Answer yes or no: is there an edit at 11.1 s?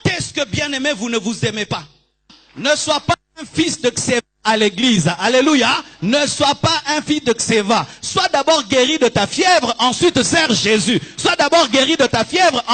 no